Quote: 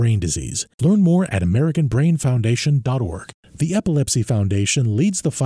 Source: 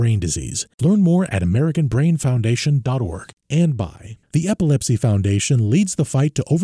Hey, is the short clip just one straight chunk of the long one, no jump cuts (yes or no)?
no